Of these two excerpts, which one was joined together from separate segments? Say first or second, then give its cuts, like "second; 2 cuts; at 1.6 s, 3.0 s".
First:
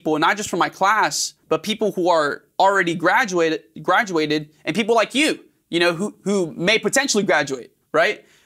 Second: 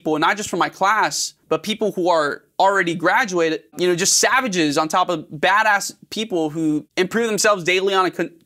second; 2 cuts; at 3.7 s, 6.9 s